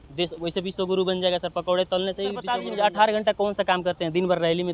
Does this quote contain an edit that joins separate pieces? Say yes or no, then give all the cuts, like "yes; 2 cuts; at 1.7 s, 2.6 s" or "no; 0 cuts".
yes; 1 cut; at 2.6 s